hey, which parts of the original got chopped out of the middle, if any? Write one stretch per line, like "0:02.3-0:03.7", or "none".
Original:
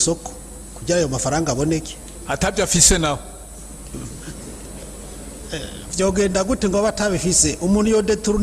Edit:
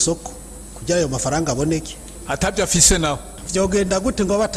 0:03.3-0:05.8